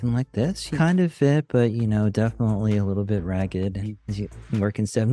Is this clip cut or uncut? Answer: uncut